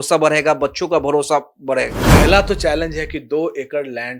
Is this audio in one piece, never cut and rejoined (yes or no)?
no